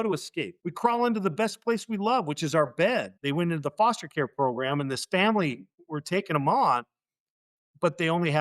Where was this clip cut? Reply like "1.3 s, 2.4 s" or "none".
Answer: 3.1 s